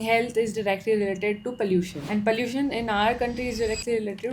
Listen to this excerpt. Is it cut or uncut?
uncut